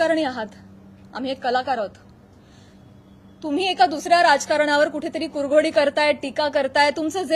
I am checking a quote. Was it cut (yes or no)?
no